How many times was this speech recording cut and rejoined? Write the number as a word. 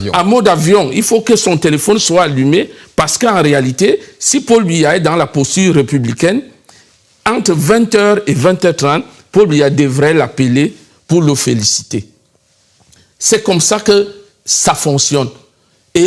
one